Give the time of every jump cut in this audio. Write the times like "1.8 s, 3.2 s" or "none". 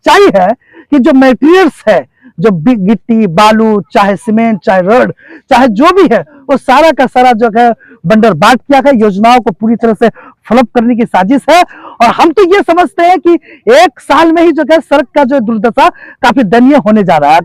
none